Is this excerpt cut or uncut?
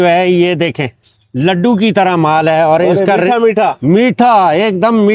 uncut